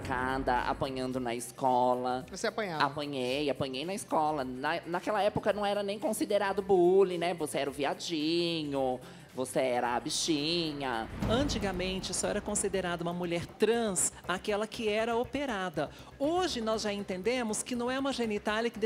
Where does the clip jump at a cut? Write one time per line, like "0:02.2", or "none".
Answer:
0:11.2